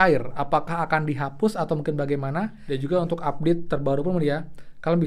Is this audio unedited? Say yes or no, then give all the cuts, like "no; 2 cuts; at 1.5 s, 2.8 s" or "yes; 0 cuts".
no; 1 cut; at 2.6 s